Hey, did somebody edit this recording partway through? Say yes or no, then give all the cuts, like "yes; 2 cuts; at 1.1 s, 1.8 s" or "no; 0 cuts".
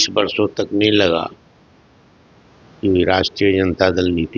no; 0 cuts